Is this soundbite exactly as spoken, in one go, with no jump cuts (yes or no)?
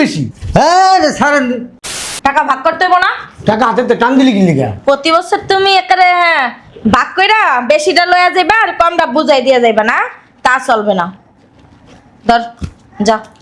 no